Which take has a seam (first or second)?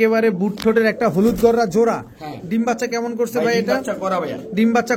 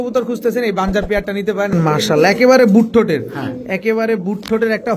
second